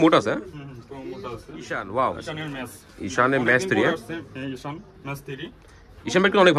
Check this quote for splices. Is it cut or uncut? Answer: cut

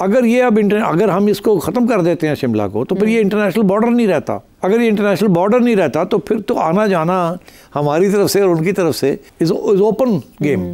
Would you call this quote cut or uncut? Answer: cut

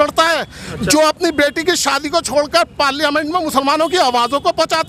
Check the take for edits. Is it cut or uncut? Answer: uncut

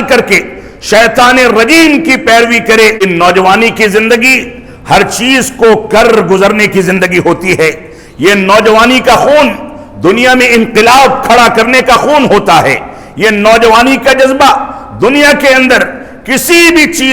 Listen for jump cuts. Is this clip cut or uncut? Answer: cut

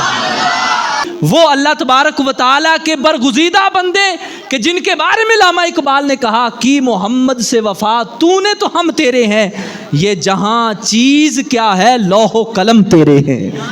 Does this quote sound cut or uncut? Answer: cut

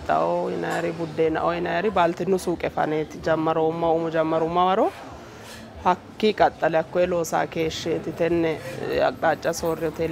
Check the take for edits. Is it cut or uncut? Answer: uncut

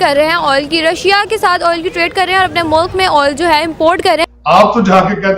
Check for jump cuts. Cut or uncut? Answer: cut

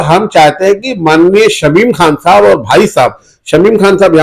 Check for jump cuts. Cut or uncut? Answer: uncut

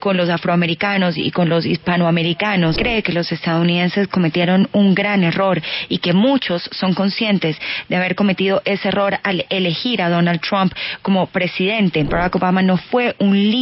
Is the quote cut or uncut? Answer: cut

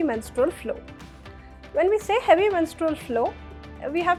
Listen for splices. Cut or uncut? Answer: uncut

